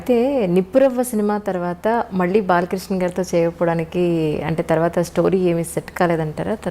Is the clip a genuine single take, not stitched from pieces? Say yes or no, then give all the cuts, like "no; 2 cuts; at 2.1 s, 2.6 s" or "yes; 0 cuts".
yes; 0 cuts